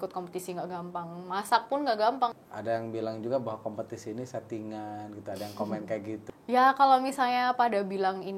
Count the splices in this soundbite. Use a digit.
2